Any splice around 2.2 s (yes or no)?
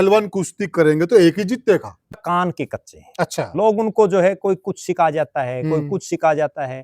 yes